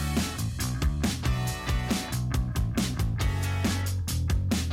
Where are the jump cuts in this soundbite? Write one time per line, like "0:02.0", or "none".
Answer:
0:02.5